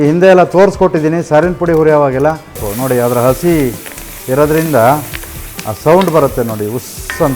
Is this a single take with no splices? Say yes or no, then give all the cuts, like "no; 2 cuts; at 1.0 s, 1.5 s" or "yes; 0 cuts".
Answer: no; 1 cut; at 2.7 s